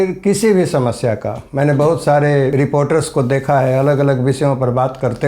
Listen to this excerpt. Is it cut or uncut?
cut